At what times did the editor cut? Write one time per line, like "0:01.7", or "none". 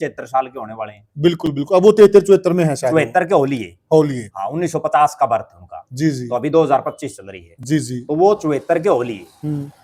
none